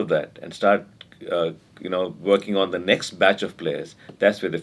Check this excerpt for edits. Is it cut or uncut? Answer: uncut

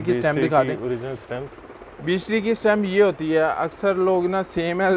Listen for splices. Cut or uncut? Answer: uncut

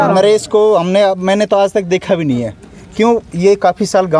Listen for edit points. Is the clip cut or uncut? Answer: uncut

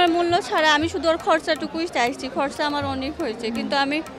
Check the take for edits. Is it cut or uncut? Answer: uncut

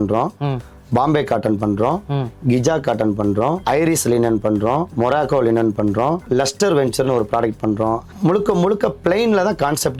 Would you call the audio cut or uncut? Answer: uncut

